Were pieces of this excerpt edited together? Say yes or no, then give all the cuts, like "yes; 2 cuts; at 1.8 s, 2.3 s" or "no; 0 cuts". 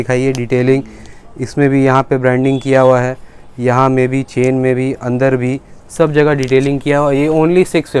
no; 0 cuts